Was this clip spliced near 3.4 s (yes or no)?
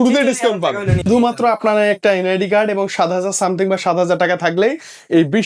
no